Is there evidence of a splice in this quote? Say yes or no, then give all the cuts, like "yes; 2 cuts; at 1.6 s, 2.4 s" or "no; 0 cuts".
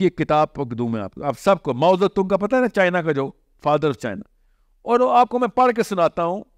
no; 0 cuts